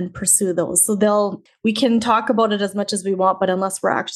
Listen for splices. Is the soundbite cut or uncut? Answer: cut